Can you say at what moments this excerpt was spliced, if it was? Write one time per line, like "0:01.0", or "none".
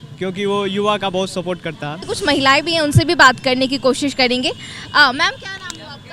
0:02.1